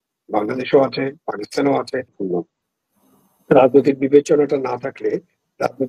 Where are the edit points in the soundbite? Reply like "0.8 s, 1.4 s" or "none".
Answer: 2.2 s

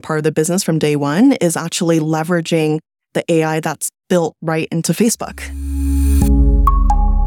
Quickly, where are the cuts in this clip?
5.5 s

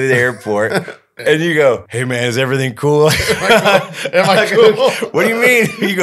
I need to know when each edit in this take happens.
1.1 s, 1.9 s

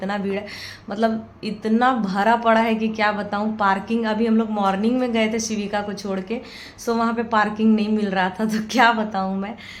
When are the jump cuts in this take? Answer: none

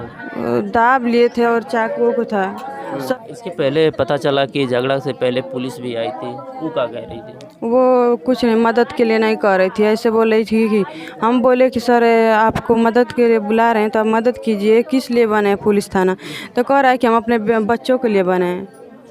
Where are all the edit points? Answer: 3.1 s

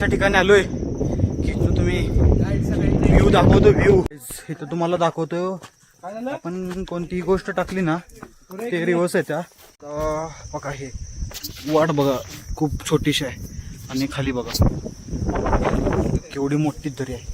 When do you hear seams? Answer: 4.1 s, 9.8 s

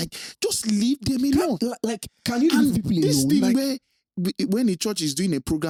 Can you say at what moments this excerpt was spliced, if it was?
none

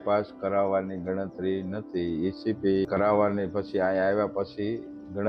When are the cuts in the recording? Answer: none

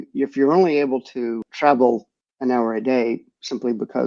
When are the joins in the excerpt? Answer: 1.4 s

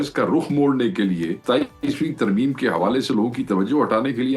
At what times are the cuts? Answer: 1.4 s

